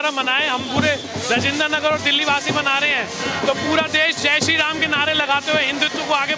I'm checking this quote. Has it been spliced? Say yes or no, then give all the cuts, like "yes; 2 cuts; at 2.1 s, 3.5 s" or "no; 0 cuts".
no; 0 cuts